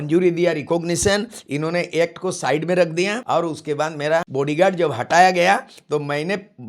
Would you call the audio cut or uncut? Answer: cut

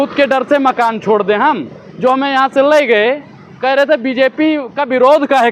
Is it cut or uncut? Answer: uncut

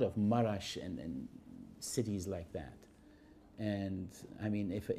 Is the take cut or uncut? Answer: uncut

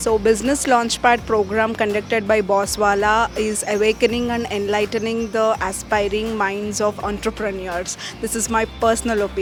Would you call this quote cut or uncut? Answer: uncut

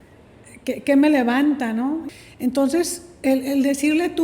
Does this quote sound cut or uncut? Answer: cut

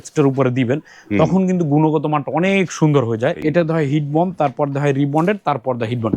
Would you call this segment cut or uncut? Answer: cut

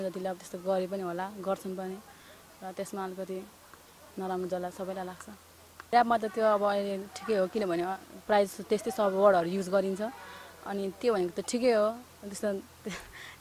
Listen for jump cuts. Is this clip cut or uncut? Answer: cut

